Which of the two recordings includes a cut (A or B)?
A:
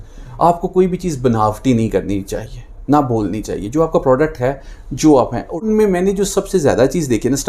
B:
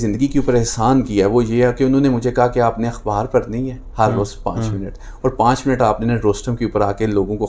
A